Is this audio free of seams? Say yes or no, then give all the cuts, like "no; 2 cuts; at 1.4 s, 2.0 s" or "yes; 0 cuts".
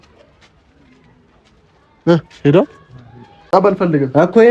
no; 1 cut; at 3.3 s